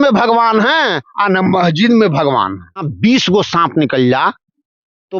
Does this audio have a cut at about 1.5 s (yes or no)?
no